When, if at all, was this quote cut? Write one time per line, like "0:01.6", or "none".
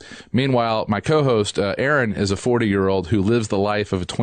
0:02.6